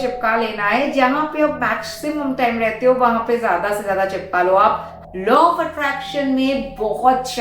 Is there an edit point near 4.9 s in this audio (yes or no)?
yes